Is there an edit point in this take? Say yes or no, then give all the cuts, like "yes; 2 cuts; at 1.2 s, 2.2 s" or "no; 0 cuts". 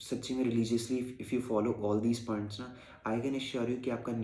no; 0 cuts